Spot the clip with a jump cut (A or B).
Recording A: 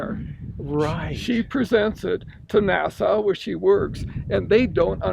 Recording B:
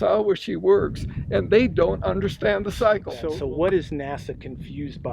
B